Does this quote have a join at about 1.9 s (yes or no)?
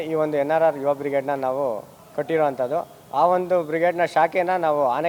no